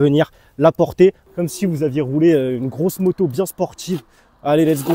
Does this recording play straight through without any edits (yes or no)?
no